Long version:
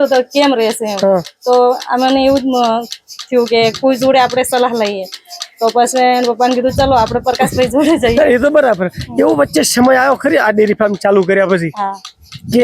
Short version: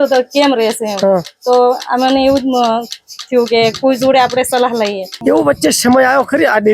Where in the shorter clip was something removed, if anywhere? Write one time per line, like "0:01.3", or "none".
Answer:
0:05.1